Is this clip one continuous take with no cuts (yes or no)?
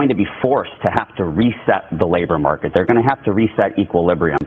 no